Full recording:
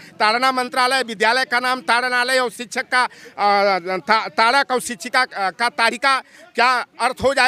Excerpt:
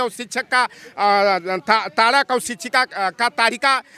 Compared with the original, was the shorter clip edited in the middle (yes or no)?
no